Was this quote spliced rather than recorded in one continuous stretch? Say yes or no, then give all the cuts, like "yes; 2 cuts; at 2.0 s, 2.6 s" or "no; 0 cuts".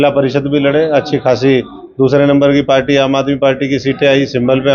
no; 0 cuts